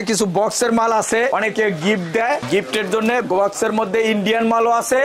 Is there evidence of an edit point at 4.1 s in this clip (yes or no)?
no